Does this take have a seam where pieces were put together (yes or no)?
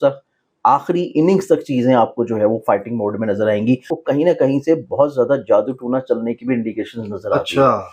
yes